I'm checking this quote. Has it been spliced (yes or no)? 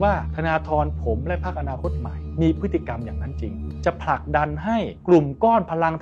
no